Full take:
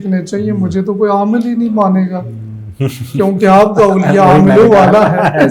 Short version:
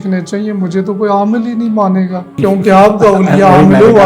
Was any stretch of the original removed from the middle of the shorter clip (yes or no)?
yes